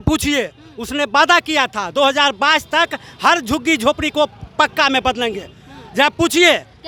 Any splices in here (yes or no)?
no